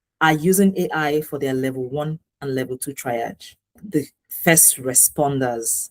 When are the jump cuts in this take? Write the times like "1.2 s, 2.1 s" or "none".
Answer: 3.8 s